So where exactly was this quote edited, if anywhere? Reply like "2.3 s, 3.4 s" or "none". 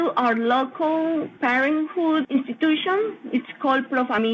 none

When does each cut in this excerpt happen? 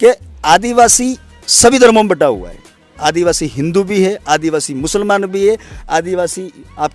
none

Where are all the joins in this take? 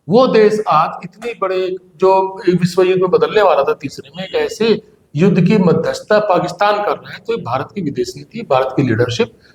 none

